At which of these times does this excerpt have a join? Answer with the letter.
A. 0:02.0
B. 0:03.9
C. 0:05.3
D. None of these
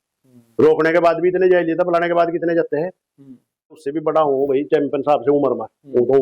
B